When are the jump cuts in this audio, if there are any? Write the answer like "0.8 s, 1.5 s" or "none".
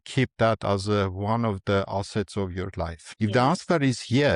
3.0 s